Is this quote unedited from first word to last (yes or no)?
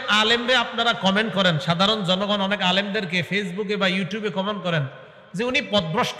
yes